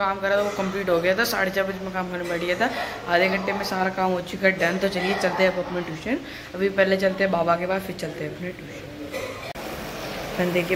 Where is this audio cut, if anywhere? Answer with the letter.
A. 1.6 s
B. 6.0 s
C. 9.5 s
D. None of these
D